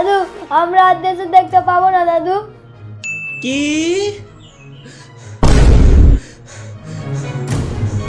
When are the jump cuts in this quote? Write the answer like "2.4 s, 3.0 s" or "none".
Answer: none